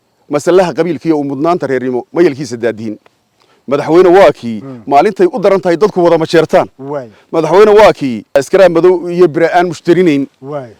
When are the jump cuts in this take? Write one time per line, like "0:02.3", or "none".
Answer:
none